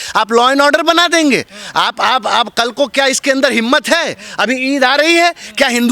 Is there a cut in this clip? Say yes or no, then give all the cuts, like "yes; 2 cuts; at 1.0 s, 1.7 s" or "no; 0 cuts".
no; 0 cuts